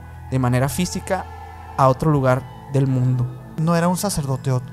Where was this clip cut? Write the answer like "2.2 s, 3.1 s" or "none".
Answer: 3.5 s

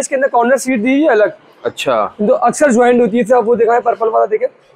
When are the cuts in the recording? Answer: none

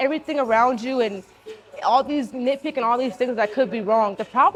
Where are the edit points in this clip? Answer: none

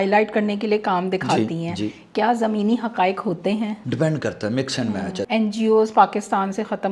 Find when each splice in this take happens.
3.8 s, 5.2 s

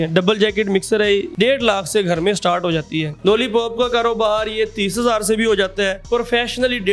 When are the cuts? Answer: 1.3 s, 3.0 s, 6.0 s

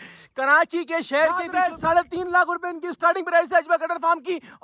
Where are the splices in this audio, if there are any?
1.5 s

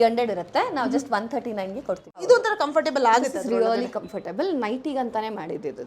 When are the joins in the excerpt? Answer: 2.0 s

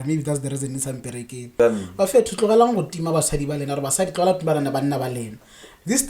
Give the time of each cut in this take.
1.6 s

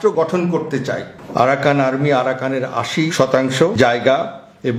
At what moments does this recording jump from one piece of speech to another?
1.1 s, 3.1 s

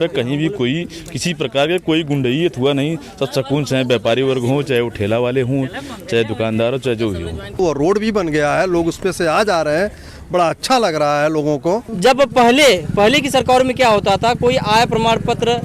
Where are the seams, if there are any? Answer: 7.6 s, 11.9 s

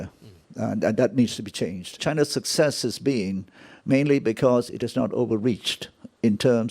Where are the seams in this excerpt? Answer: 2.0 s

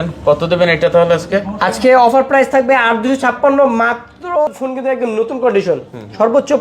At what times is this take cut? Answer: 4.5 s

